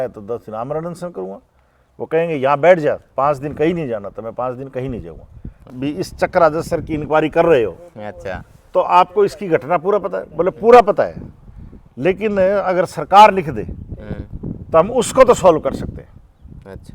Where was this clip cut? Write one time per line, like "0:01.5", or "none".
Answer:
0:05.7